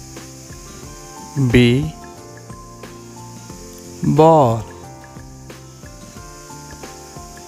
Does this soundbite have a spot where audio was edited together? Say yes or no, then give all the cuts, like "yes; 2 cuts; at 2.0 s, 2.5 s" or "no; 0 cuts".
yes; 4 cuts; at 1.3 s, 2.5 s, 4.0 s, 5.1 s